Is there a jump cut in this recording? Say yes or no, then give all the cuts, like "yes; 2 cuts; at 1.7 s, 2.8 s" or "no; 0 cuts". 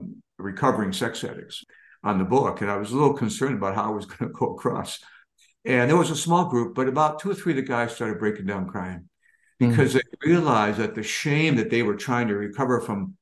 yes; 1 cut; at 1.6 s